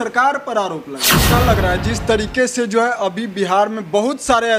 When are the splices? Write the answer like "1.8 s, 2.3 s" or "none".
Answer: 1.1 s